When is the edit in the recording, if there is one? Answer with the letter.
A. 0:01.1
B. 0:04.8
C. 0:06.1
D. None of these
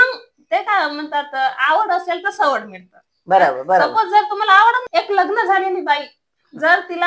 B